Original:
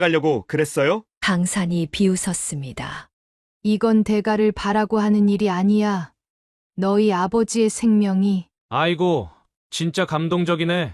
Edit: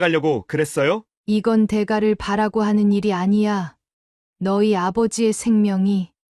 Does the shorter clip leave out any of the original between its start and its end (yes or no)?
yes